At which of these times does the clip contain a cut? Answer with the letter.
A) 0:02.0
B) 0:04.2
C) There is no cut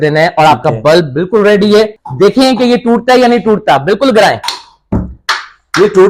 A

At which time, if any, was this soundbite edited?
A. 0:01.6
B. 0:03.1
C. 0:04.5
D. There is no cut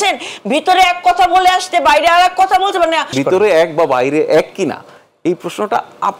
B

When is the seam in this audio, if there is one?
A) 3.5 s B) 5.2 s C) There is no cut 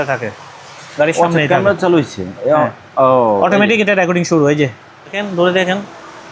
B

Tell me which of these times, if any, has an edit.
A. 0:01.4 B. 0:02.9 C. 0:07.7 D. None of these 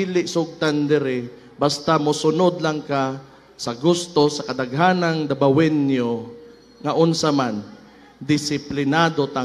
D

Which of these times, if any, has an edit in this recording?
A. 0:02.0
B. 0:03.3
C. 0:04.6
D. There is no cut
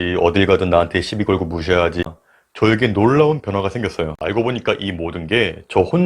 A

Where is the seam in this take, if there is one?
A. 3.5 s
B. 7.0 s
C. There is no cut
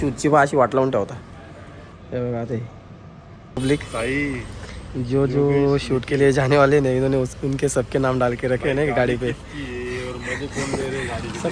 A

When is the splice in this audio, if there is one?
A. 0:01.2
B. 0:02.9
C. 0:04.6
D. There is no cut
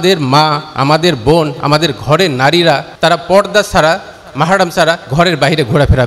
B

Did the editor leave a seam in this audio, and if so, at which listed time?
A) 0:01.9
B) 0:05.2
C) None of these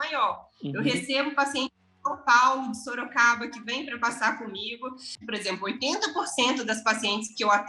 B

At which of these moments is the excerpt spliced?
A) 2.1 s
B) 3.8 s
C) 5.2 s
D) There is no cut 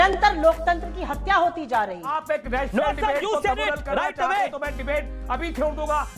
A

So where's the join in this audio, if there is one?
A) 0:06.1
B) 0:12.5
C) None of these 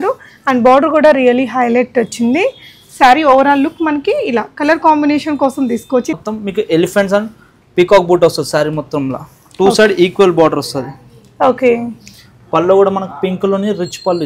A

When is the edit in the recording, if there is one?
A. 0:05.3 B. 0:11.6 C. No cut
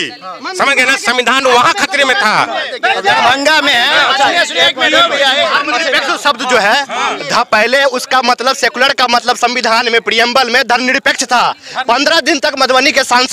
C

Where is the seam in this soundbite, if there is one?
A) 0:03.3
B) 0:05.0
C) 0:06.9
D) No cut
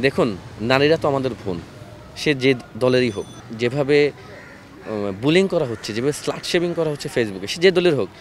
A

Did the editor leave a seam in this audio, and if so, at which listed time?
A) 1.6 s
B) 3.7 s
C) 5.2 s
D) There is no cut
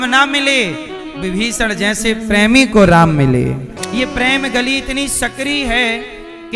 B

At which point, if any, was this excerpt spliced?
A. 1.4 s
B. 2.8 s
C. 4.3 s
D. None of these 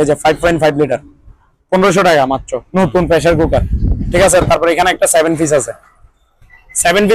D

